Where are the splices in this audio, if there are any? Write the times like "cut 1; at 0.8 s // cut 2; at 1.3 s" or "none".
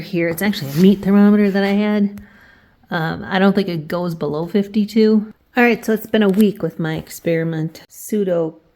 cut 1; at 5.4 s // cut 2; at 7.8 s